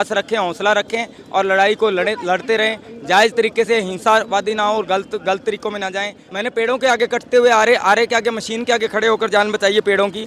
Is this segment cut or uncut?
cut